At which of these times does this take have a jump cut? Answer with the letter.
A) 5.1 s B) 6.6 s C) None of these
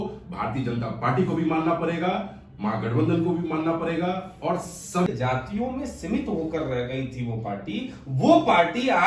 A